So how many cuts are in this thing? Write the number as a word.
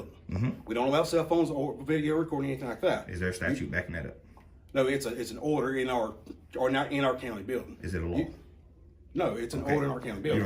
zero